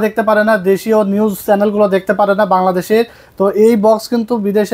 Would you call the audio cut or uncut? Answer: uncut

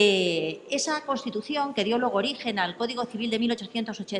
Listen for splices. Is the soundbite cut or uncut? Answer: uncut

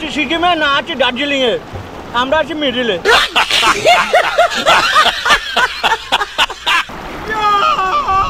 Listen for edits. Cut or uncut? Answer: cut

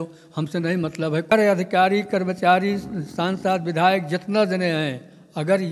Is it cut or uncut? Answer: cut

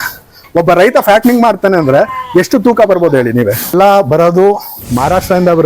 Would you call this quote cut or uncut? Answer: cut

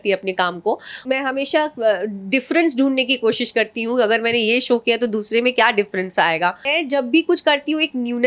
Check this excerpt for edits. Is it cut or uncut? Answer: cut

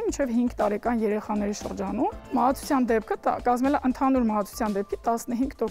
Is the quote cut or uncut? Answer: cut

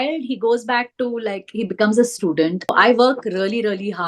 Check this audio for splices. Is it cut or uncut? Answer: cut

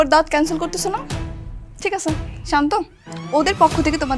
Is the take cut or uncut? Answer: uncut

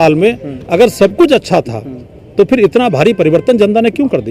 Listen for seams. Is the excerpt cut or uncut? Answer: uncut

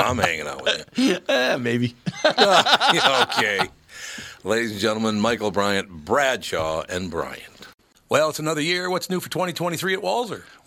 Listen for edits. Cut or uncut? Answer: cut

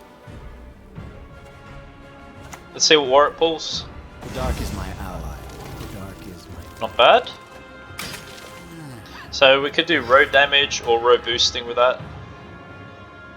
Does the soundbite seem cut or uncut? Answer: uncut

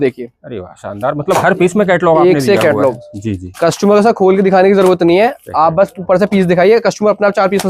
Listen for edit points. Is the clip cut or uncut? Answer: uncut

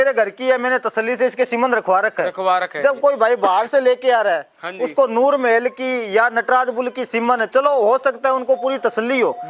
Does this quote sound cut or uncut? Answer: uncut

